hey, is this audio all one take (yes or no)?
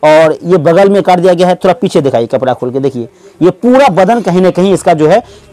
yes